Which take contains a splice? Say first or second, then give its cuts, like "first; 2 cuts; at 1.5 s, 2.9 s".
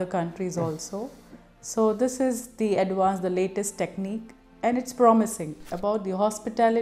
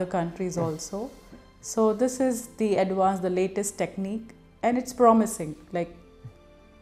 first; 1 cut; at 5.6 s